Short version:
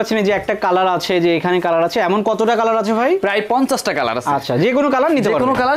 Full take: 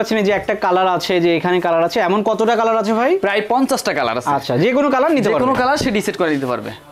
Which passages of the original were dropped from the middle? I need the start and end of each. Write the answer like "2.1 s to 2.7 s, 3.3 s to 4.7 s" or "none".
none

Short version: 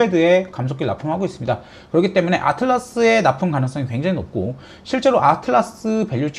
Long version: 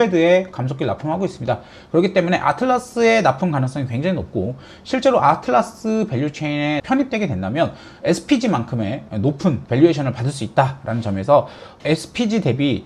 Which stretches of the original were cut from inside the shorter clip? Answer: none

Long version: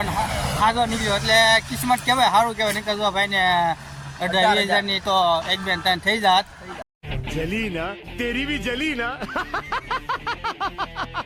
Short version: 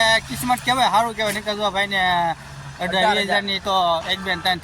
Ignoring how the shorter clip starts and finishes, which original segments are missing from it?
none

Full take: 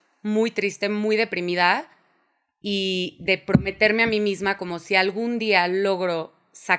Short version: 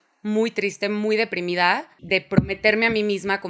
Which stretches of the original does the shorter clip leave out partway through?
2.0 s to 3.1 s

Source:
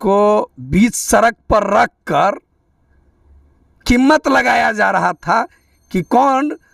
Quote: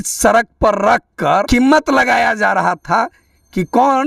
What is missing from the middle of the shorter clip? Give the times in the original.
2.3 s to 3.8 s

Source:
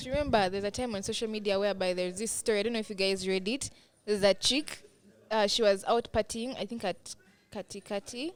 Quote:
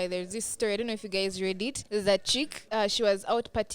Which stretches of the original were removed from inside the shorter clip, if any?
3.7 s to 4.0 s, 4.7 s to 5.2 s

